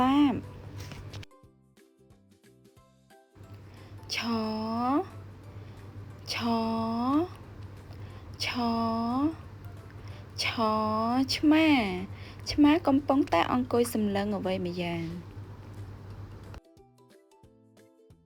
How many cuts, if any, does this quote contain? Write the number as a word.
zero